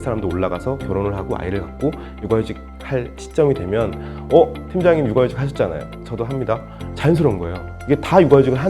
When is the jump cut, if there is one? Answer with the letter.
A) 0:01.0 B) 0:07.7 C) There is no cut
B